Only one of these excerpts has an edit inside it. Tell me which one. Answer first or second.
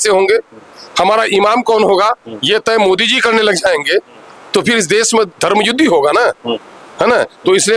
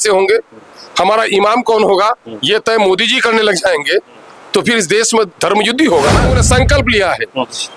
second